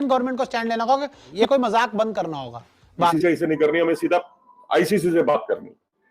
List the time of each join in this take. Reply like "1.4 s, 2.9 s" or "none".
1.2 s, 3.1 s